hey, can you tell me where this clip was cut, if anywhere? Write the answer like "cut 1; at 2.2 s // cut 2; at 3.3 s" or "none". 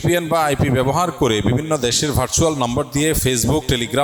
none